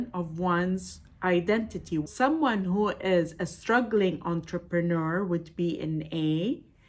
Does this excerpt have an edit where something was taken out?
yes; 1 cut; at 2.0 s

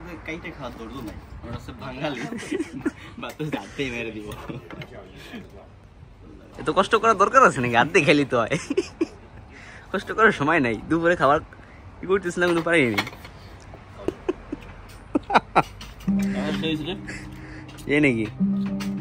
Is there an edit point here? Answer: yes; 2 cuts; at 6.5 s, 14.1 s

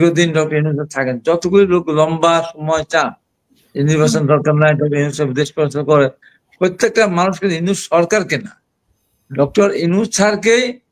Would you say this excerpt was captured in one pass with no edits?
yes; 0 cuts

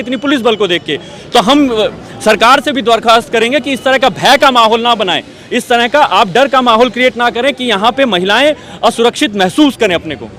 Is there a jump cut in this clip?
no; 0 cuts

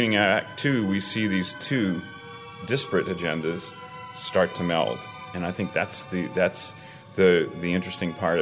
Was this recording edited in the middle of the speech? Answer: no; 0 cuts

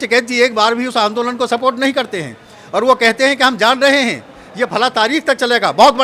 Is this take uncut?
yes; 0 cuts

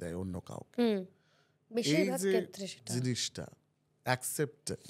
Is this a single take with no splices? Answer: yes; 0 cuts

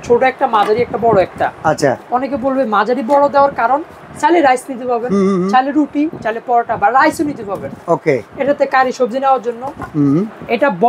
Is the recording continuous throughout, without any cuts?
yes; 0 cuts

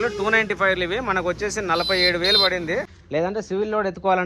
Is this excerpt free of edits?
no; 1 cut; at 3.0 s

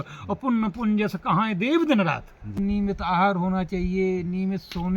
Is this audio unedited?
no; 1 cut; at 2.6 s

